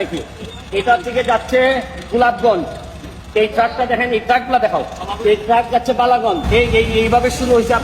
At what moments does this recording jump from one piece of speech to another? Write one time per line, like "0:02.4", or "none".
0:06.4